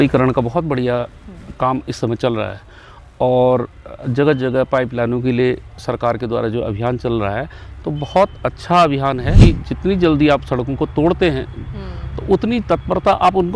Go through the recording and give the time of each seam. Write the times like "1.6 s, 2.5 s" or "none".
9.4 s

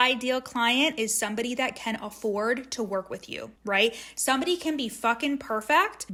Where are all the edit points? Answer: none

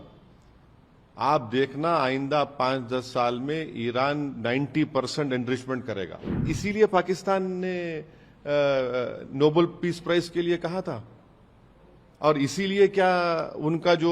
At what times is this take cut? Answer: 6.5 s

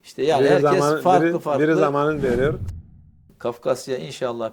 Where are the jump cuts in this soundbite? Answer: 3.0 s

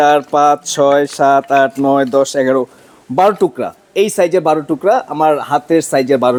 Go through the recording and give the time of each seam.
none

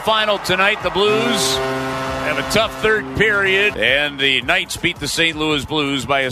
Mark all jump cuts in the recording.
3.7 s

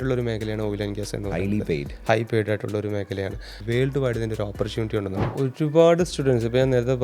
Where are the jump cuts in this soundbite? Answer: 3.5 s, 5.3 s

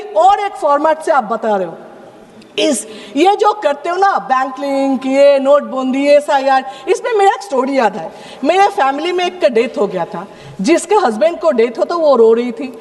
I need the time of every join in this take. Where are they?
none

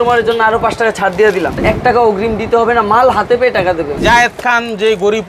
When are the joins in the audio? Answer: 1.6 s, 4.0 s

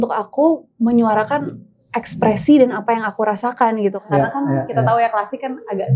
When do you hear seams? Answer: 4.0 s

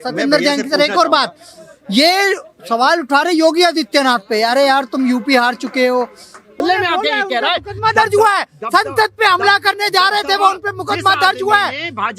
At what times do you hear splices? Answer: 6.6 s

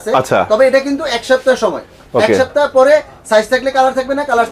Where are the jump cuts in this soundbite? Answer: none

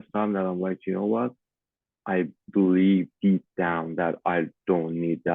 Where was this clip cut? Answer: none

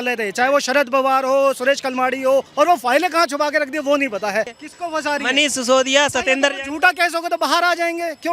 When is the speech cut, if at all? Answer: 2.5 s, 4.6 s

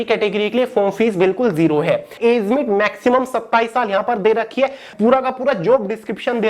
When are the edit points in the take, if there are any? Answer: 2.1 s, 4.9 s

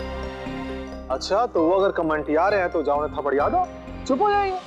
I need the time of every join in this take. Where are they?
0.9 s

